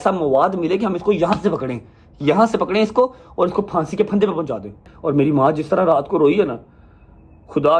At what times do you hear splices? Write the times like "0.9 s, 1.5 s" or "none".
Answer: 4.9 s